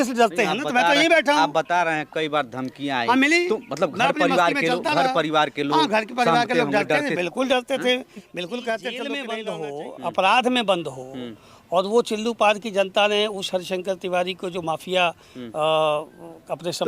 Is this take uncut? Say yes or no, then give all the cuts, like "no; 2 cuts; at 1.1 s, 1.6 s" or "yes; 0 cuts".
no; 1 cut; at 9.3 s